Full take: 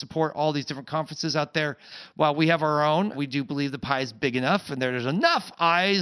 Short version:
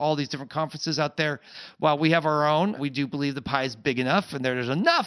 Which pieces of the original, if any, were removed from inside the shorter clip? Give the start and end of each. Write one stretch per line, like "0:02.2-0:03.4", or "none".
none